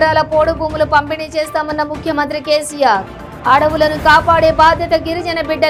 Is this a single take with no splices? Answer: yes; 0 cuts

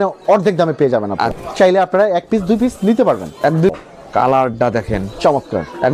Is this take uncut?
no; 2 cuts; at 1.4 s, 3.7 s

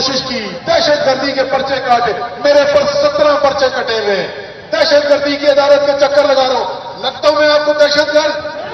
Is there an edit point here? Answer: no; 0 cuts

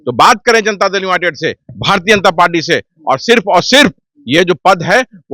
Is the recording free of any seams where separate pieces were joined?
yes; 0 cuts

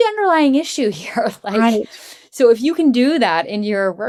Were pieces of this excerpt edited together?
no; 0 cuts

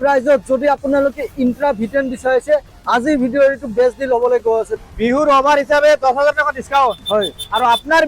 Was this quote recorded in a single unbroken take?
no; 1 cut; at 4.7 s

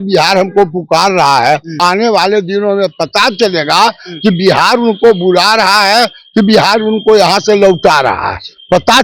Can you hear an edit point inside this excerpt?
yes; 1 cut; at 1.8 s

